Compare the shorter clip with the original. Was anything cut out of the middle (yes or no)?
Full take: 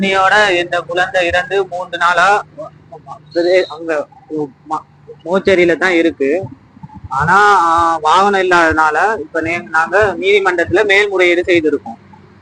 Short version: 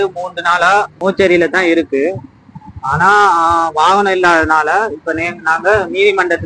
yes